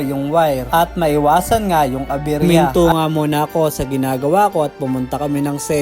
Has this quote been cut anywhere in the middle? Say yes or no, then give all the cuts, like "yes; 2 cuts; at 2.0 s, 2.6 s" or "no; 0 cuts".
yes; 1 cut; at 2.4 s